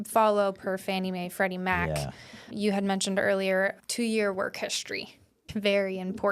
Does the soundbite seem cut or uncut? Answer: cut